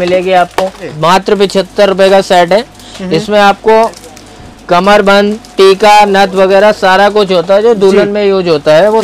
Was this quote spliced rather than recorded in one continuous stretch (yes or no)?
yes